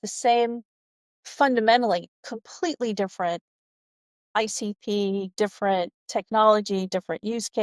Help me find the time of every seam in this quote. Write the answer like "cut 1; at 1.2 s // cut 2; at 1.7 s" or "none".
cut 1; at 4.2 s // cut 2; at 6.0 s